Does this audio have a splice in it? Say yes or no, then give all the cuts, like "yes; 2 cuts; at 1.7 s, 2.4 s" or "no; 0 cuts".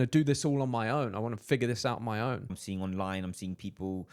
yes; 1 cut; at 2.6 s